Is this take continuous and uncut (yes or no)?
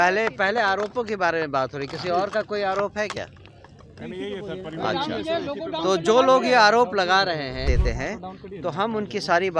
no